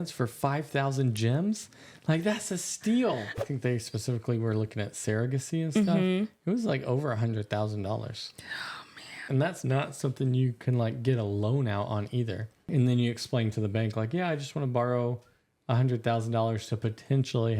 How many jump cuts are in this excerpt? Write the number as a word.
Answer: three